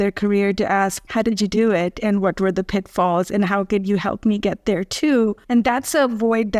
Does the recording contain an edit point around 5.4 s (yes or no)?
yes